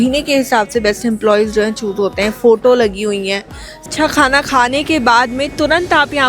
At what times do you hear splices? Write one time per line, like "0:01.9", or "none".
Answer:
0:03.9